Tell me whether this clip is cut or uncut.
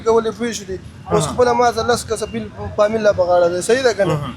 uncut